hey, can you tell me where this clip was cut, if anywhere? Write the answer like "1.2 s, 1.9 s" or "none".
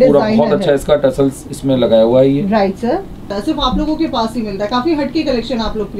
3.3 s